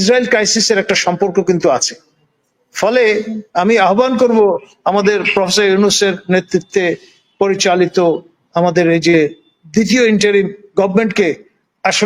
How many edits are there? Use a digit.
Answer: 0